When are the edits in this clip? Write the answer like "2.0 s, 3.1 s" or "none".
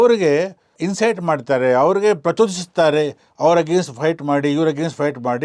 none